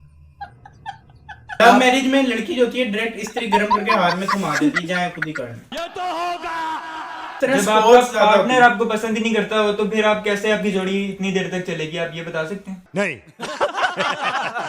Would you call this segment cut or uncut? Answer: cut